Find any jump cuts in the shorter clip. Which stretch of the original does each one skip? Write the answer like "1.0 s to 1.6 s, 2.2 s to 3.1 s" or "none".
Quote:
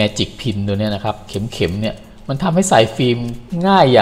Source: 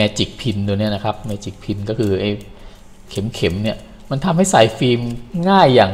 1.2 s to 3.1 s